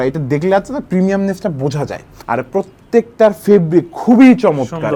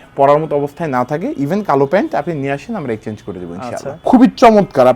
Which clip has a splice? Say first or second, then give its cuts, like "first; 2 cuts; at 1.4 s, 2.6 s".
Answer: second; 1 cut; at 3.9 s